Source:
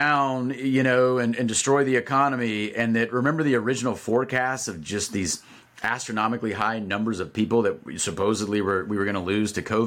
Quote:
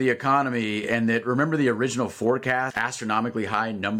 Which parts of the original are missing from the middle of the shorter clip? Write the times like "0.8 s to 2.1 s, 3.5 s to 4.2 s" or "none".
4.6 s to 5.8 s